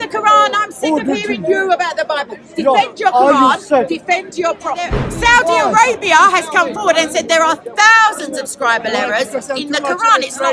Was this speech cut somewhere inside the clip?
yes; 1 cut; at 5.0 s

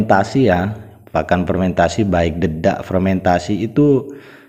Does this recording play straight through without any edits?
yes; 0 cuts

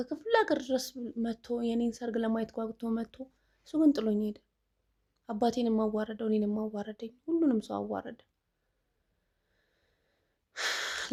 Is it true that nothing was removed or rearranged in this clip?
yes; 0 cuts

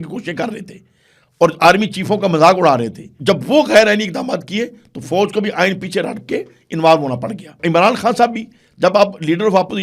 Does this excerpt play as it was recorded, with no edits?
no; 2 cuts; at 3.0 s, 7.6 s

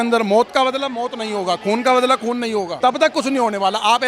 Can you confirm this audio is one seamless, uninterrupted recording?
no; 1 cut; at 2.7 s

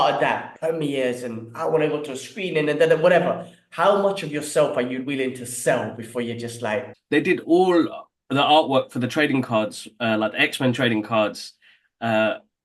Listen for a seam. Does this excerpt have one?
yes; 1 cut; at 6.9 s

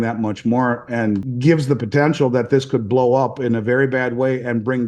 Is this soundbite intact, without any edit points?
no; 1 cut; at 1.3 s

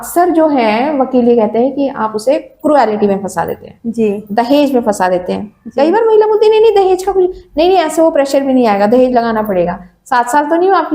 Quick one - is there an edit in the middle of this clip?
no; 0 cuts

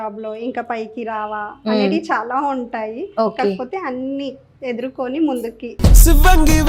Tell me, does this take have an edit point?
no; 0 cuts

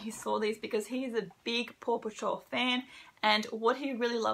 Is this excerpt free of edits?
yes; 0 cuts

